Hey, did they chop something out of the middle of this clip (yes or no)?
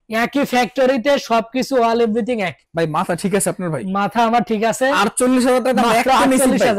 yes